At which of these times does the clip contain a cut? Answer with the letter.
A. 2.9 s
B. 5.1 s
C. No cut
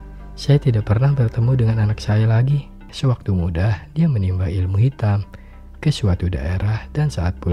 A